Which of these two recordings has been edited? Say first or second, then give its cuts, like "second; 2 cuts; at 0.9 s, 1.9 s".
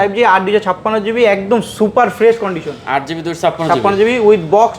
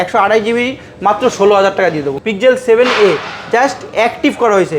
second; 1 cut; at 2.1 s